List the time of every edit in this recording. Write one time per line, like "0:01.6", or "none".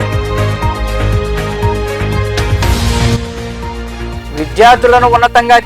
0:02.5